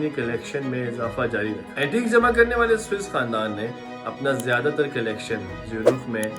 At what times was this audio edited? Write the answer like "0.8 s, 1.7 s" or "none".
1.7 s